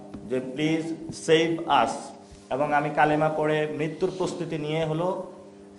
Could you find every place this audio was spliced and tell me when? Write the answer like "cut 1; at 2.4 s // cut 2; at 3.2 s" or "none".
none